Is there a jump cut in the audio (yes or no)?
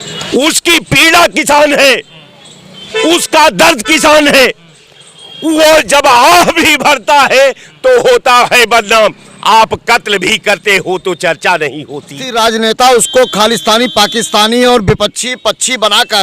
yes